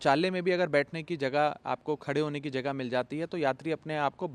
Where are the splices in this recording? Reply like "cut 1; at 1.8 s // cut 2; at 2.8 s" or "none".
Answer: none